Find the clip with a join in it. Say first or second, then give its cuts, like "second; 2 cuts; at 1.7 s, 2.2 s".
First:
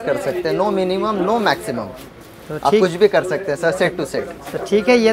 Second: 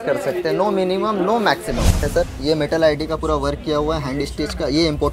second; 1 cut; at 2.0 s